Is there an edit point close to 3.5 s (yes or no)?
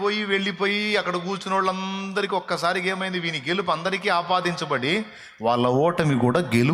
no